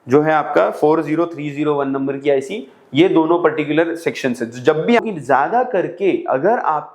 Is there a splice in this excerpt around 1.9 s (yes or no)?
no